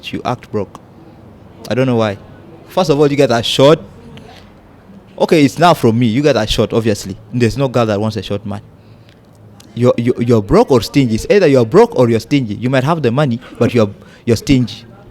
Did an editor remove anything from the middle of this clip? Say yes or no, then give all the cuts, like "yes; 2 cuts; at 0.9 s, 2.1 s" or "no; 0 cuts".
yes; 1 cut; at 2.6 s